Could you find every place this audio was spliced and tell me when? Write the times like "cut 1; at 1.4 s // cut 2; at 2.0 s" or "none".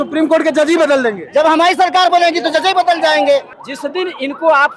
cut 1; at 3.5 s